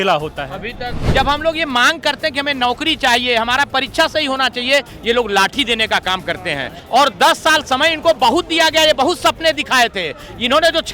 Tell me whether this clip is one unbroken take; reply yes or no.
no